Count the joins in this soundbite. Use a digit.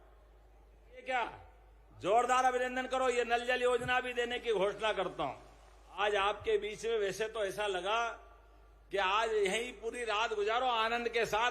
2